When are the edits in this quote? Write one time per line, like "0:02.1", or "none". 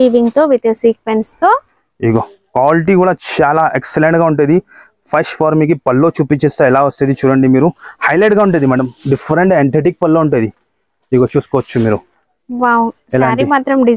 none